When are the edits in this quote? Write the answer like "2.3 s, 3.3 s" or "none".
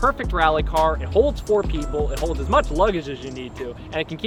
none